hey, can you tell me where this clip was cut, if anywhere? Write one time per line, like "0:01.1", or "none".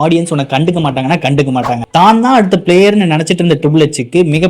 0:01.8